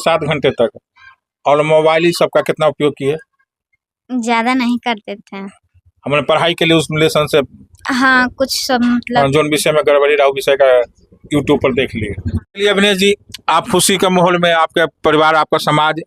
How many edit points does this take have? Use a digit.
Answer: 1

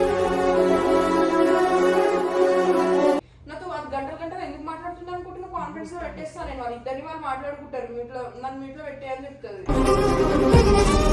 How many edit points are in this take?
1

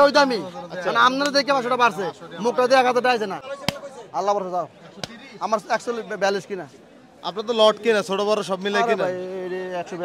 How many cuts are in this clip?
1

